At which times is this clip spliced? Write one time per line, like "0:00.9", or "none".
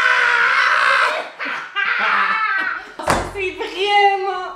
0:03.0